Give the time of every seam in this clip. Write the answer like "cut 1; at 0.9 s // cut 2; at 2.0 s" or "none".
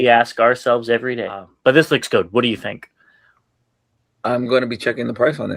cut 1; at 1.5 s